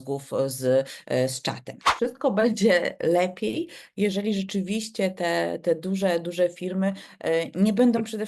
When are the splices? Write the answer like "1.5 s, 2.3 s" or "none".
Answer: 1.8 s